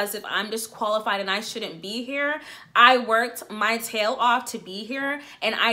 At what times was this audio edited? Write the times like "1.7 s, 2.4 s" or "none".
none